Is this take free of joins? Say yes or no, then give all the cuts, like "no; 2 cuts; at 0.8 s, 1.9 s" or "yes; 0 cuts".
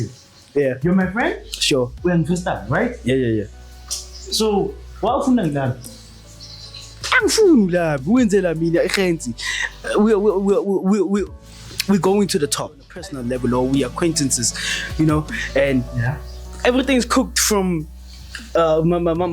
no; 1 cut; at 12.9 s